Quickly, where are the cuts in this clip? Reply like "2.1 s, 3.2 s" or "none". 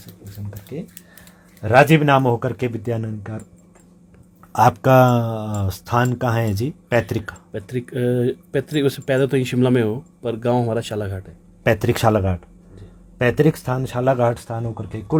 none